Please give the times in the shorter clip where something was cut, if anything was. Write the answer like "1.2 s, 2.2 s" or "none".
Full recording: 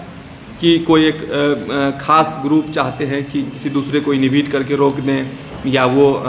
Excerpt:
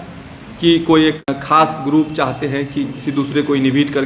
1.3 s